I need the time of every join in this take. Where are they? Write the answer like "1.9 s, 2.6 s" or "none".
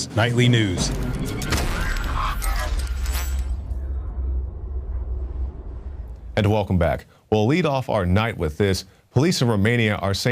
7.8 s